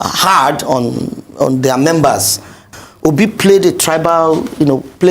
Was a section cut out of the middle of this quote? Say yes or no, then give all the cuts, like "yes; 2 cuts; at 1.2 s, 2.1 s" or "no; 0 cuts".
yes; 1 cut; at 2.6 s